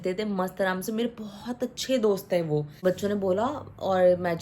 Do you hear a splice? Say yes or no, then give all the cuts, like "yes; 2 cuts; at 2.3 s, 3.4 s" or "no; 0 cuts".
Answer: yes; 1 cut; at 2.8 s